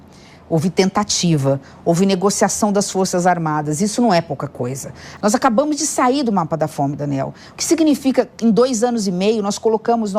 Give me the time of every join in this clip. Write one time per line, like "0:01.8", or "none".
0:05.1